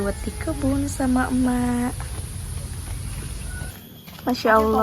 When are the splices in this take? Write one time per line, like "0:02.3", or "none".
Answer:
0:03.7